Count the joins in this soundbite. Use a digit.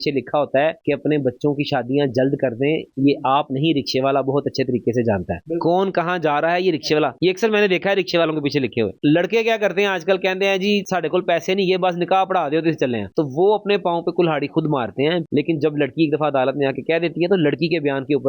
3